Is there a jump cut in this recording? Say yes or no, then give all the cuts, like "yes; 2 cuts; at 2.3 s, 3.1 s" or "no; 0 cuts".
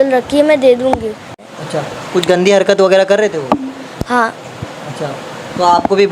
yes; 1 cut; at 1.3 s